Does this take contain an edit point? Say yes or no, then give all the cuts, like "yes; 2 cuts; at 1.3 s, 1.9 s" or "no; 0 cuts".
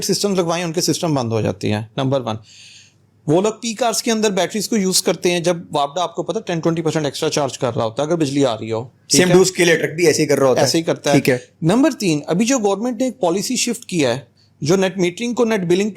no; 0 cuts